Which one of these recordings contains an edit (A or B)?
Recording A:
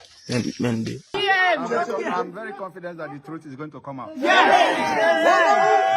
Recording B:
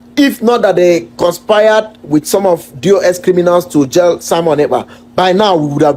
A